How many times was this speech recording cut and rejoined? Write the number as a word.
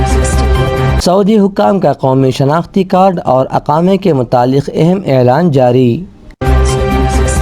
two